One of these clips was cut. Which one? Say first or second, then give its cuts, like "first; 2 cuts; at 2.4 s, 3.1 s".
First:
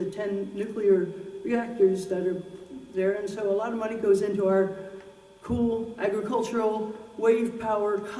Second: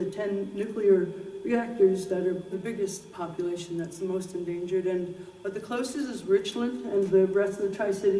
first; 1 cut; at 2.5 s